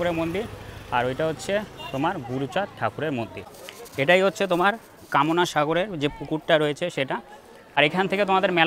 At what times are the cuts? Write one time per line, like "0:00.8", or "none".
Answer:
0:03.3
0:07.6